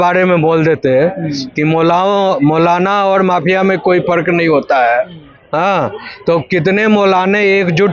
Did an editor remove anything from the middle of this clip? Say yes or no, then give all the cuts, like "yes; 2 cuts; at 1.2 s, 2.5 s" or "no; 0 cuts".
no; 0 cuts